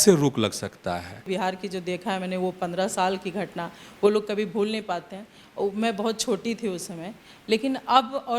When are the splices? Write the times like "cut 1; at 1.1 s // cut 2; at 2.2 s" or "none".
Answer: cut 1; at 1.3 s